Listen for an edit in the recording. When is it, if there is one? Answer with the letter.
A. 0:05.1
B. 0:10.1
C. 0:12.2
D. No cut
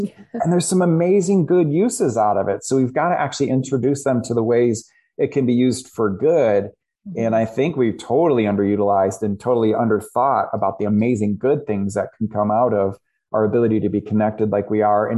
D